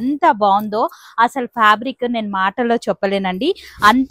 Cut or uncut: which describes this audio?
uncut